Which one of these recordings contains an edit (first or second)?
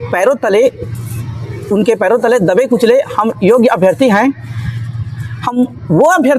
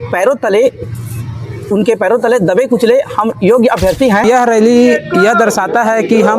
second